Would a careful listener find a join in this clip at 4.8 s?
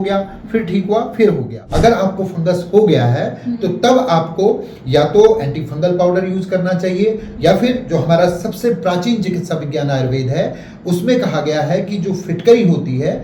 no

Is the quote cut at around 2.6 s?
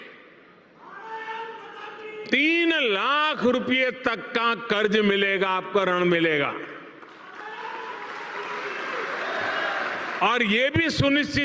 no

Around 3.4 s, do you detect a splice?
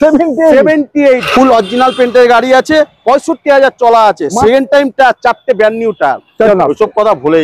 no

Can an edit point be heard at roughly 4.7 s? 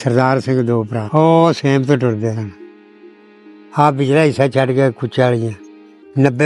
no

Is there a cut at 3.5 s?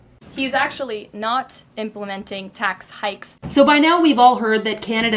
yes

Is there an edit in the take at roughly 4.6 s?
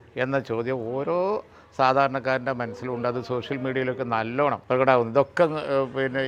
yes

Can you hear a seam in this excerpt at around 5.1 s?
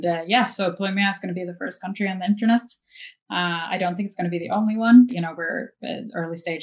yes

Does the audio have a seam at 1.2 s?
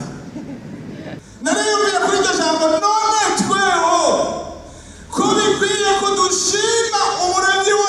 yes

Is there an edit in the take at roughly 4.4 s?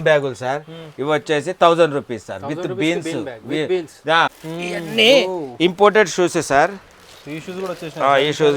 yes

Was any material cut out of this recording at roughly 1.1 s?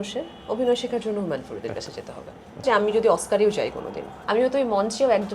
no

